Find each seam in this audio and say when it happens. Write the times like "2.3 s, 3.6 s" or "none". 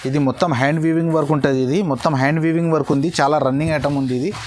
none